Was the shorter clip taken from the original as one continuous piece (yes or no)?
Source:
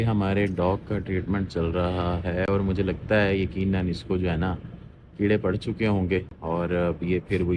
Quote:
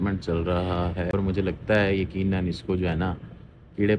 no